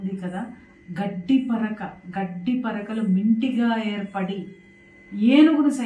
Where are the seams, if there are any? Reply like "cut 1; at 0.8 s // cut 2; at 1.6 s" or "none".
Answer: none